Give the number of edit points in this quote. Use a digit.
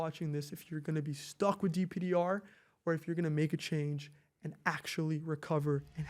0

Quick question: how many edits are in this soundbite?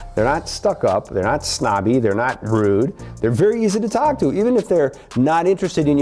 0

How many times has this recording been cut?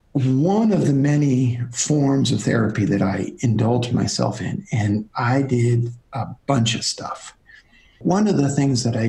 1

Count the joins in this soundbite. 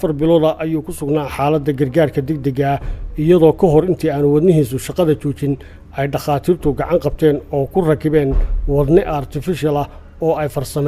1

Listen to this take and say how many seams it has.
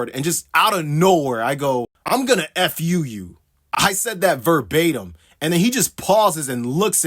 1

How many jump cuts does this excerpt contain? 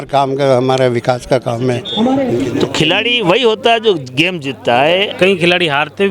2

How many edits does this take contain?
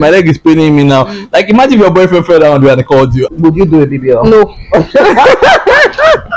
1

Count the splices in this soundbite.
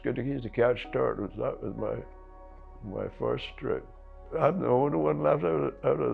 1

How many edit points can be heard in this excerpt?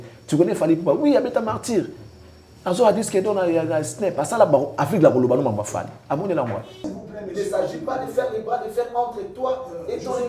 1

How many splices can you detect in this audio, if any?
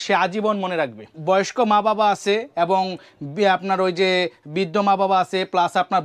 1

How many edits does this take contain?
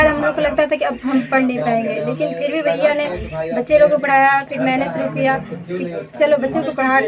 0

